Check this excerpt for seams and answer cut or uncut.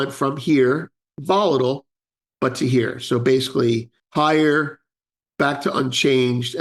cut